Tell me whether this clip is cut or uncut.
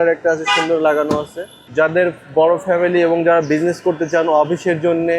cut